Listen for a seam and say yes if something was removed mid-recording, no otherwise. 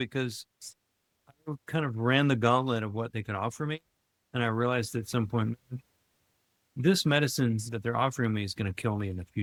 no